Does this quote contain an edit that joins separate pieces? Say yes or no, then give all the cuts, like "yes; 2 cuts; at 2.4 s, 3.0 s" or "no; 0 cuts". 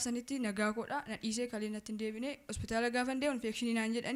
no; 0 cuts